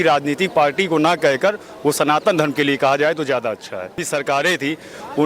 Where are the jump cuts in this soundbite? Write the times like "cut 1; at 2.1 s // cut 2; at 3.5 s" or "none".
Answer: cut 1; at 4.0 s